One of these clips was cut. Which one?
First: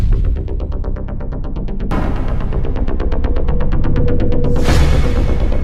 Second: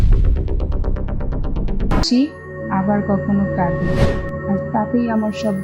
second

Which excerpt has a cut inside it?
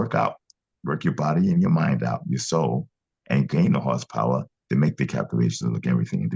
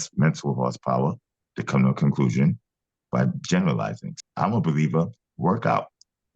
second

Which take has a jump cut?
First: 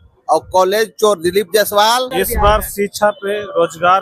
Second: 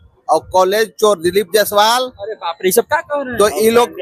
first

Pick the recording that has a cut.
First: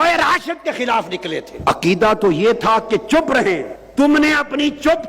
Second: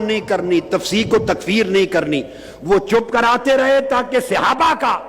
first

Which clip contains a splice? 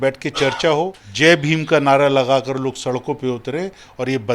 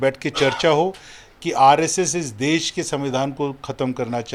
first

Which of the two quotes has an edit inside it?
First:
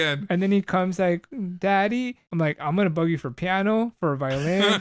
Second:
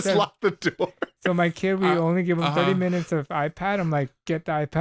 first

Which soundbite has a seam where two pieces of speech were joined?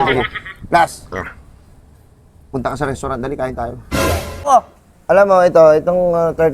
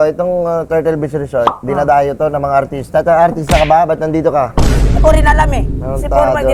first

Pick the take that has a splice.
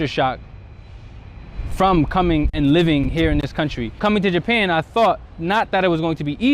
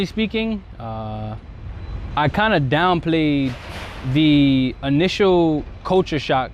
first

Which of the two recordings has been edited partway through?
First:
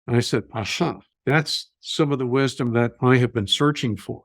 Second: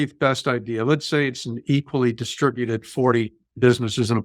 first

